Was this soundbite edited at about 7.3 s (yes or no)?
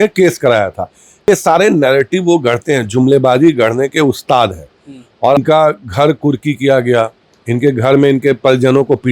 no